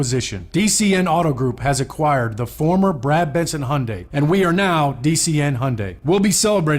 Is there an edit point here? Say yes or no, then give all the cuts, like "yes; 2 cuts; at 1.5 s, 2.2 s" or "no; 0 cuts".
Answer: yes; 2 cuts; at 4.0 s, 5.9 s